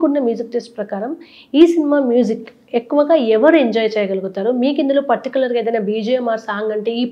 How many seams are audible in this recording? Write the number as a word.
zero